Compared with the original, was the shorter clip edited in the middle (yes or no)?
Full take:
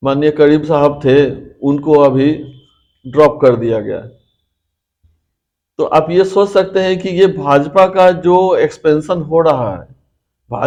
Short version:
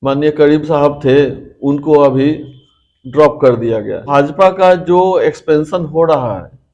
yes